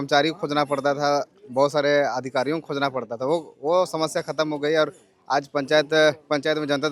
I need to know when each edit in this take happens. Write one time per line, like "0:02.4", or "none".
none